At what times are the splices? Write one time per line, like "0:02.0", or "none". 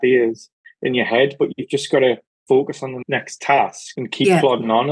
none